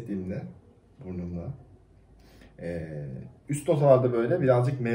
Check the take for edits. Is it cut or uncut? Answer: uncut